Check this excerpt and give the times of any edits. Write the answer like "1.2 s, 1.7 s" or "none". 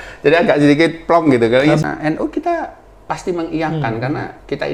1.8 s